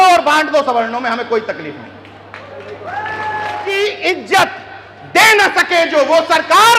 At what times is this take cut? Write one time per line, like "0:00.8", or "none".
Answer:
0:03.7